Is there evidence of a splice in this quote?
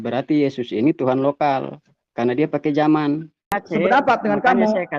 yes; 1 cut; at 3.6 s

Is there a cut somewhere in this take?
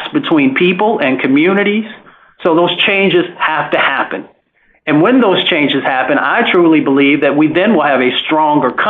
yes; 1 cut; at 2.3 s

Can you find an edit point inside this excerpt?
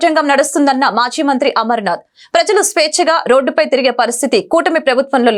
no; 0 cuts

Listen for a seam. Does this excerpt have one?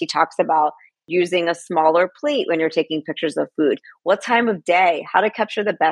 no; 0 cuts

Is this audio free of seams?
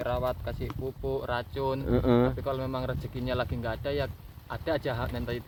yes; 0 cuts

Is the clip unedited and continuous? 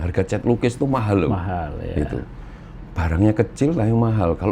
yes; 0 cuts

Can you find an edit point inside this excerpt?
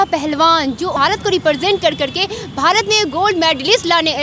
yes; 1 cut; at 0.9 s

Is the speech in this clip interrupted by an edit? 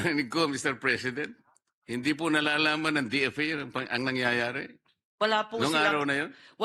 no; 0 cuts

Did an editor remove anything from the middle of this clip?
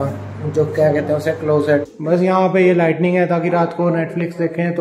yes; 1 cut; at 1.9 s

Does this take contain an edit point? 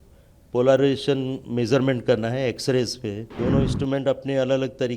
yes; 1 cut; at 3.3 s

